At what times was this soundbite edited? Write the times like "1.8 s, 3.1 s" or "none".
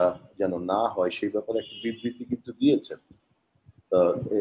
none

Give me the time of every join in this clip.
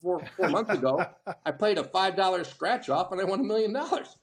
none

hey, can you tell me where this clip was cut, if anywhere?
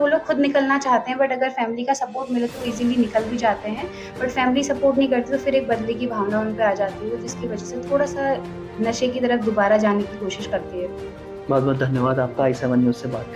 none

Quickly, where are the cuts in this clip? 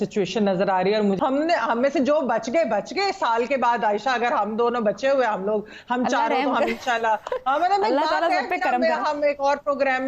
1.2 s

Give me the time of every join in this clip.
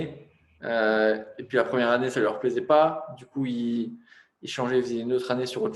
none

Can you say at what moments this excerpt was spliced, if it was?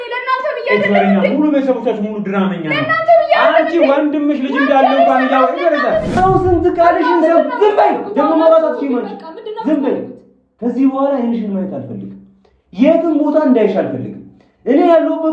6.2 s

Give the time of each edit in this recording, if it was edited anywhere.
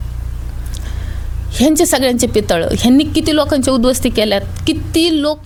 none

